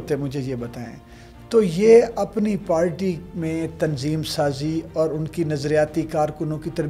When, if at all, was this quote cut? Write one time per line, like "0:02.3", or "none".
none